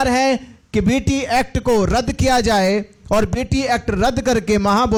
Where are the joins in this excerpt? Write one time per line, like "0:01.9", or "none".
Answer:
none